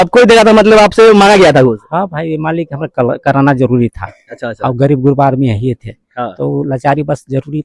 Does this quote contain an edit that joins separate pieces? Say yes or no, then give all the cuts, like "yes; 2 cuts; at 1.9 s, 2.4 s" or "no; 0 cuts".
no; 0 cuts